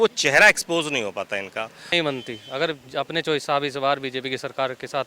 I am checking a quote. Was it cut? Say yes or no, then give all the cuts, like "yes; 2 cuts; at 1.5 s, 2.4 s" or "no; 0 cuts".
yes; 1 cut; at 1.8 s